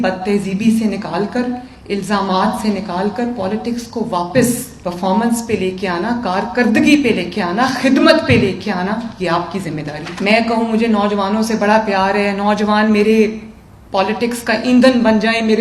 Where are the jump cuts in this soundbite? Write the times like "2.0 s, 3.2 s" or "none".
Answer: 4.7 s, 10.1 s